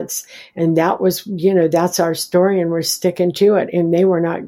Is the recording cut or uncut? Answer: uncut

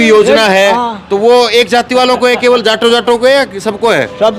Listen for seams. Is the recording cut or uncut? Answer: uncut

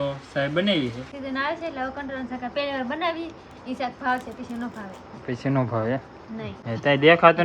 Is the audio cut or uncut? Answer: cut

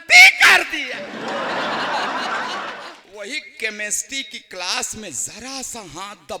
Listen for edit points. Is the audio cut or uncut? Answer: cut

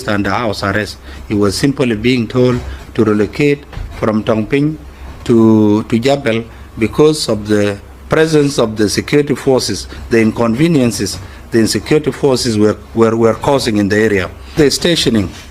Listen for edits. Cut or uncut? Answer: cut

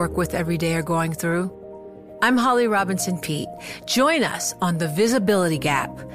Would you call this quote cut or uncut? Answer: uncut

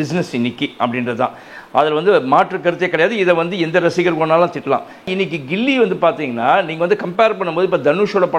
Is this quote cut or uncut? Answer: cut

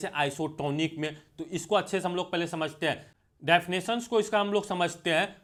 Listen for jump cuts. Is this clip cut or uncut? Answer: uncut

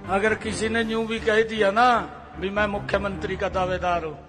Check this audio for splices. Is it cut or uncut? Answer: uncut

